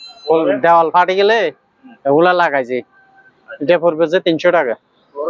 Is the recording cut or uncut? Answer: uncut